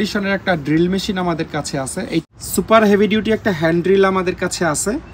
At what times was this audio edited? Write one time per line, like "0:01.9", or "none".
0:02.2